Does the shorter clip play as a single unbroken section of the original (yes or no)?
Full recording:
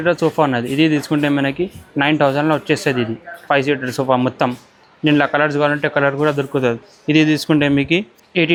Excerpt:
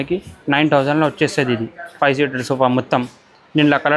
yes